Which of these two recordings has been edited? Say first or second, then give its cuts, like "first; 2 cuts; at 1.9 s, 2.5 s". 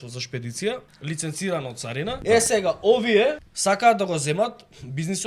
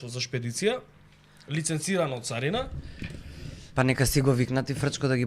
first; 3 cuts; at 0.9 s, 2.1 s, 3.5 s